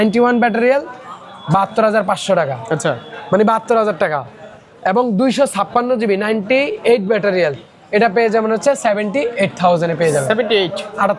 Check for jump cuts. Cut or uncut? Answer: uncut